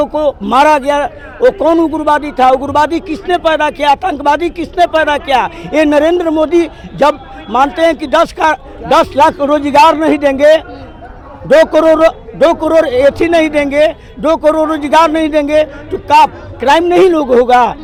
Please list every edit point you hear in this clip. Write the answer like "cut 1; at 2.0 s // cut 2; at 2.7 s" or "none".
none